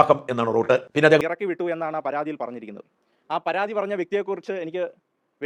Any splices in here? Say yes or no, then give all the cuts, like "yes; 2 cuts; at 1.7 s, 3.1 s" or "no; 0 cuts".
yes; 1 cut; at 1.2 s